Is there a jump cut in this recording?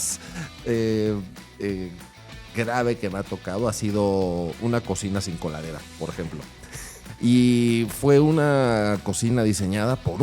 yes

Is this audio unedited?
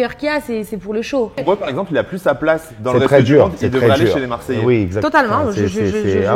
no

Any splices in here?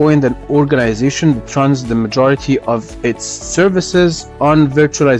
no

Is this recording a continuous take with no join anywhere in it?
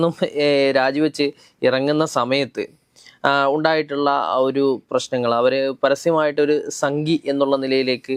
yes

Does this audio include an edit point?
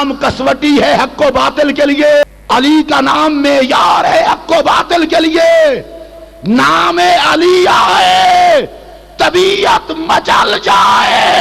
yes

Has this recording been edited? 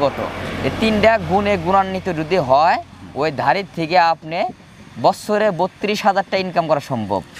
no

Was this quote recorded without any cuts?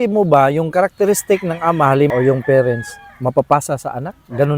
yes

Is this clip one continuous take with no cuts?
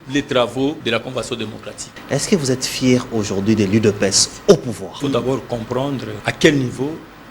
no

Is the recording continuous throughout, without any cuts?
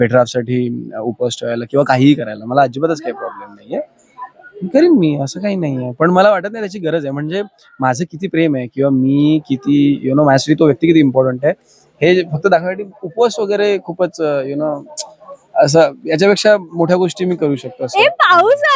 yes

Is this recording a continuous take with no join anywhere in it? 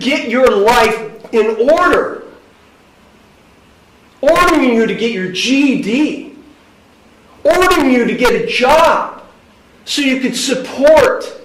yes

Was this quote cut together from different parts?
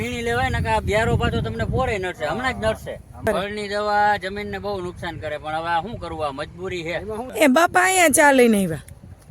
yes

